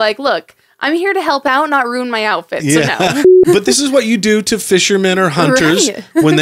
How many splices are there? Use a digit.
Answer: 1